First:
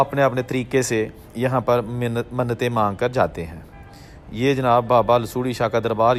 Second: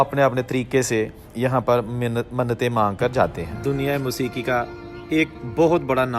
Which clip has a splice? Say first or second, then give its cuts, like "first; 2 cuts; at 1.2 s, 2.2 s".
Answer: second; 1 cut; at 3.5 s